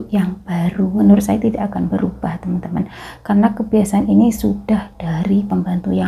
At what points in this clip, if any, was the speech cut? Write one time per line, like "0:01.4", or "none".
0:01.0